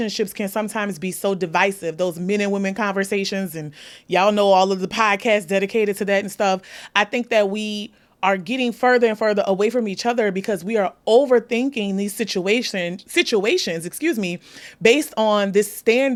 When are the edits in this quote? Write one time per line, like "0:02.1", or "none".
none

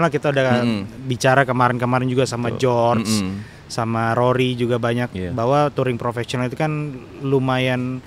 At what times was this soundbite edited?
none

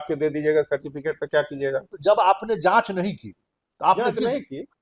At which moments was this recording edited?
0:01.9

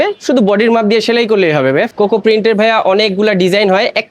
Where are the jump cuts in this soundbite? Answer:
0:01.9

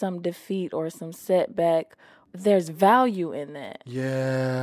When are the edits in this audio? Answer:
none

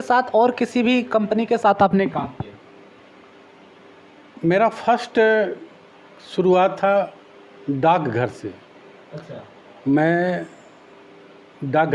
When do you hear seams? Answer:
none

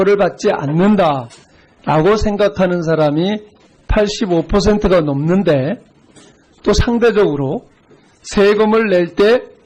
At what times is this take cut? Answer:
0:03.5

